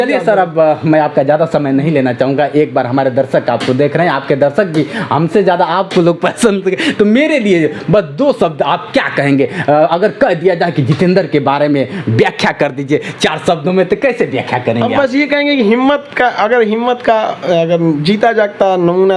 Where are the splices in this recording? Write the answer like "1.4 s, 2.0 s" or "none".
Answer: none